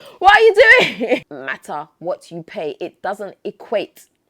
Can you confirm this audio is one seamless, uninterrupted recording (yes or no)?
no